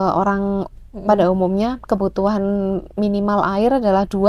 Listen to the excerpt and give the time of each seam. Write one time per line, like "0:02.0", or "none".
none